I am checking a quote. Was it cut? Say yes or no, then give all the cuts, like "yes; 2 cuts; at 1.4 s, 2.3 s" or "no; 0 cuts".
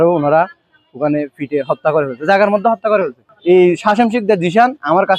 yes; 1 cut; at 3.3 s